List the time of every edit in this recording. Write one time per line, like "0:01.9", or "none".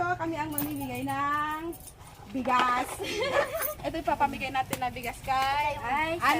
0:03.7